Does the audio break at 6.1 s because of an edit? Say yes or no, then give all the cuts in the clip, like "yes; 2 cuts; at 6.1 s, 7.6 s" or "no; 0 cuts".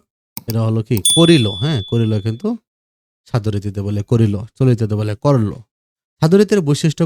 no; 0 cuts